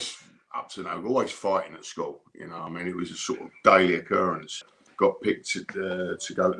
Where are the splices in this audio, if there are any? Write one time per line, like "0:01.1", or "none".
0:04.8